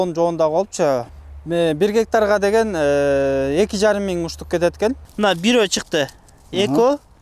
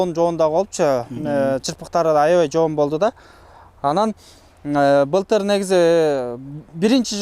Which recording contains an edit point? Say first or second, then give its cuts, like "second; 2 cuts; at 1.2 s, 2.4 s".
first; 2 cuts; at 1.1 s, 5.0 s